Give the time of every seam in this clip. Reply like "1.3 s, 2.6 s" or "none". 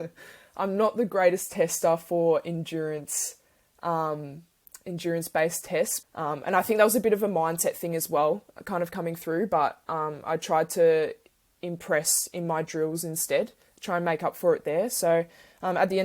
6.0 s